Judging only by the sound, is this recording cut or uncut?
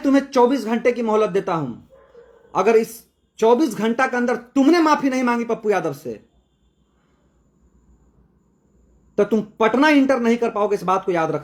uncut